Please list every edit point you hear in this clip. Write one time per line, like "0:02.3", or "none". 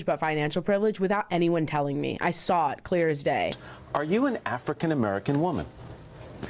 0:03.7